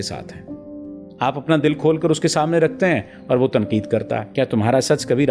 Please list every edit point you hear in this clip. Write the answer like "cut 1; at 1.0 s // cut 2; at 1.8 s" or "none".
cut 1; at 4.2 s